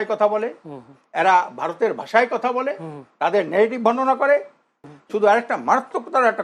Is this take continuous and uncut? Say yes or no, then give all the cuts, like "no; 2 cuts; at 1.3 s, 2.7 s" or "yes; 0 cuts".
no; 1 cut; at 4.7 s